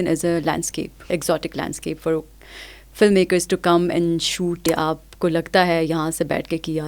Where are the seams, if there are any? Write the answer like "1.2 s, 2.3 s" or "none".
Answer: 1.0 s, 4.7 s